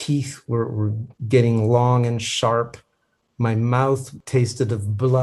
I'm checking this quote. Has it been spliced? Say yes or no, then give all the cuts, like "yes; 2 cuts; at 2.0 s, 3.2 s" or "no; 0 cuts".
yes; 2 cuts; at 1.1 s, 4.1 s